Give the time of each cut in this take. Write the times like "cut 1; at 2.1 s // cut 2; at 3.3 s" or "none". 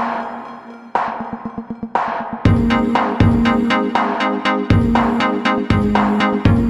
none